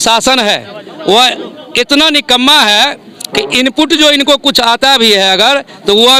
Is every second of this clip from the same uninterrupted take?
yes; 0 cuts

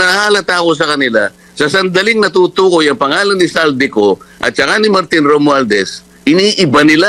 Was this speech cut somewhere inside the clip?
no; 0 cuts

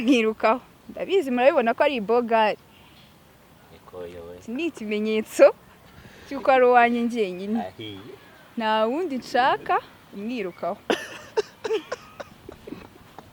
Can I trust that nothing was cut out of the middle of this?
yes; 0 cuts

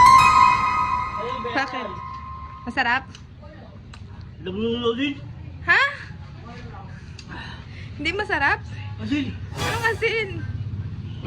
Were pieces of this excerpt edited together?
yes; 1 cut; at 1.4 s

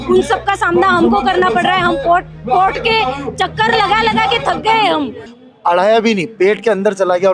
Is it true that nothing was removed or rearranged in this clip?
no; 1 cut; at 5.2 s

